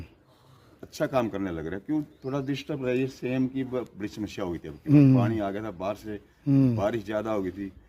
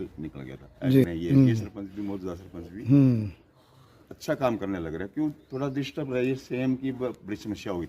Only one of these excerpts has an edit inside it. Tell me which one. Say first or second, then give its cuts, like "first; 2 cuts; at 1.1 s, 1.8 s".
second; 1 cut; at 1.0 s